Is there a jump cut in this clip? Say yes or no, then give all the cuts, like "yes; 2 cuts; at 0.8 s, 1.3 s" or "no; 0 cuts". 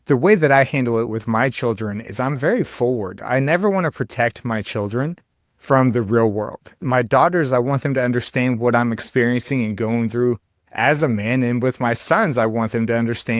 yes; 1 cut; at 6.8 s